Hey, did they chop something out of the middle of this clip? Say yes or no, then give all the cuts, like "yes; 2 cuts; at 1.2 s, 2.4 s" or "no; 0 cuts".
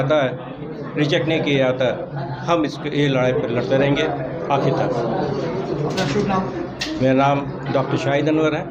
no; 0 cuts